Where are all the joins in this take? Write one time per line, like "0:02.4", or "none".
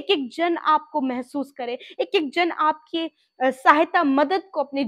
none